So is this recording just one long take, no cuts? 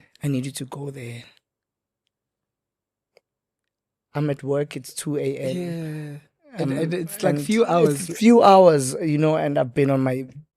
yes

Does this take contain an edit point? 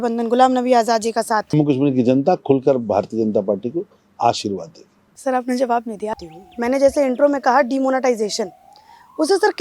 yes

